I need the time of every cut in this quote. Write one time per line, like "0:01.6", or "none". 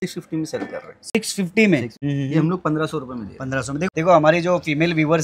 0:02.0
0:03.8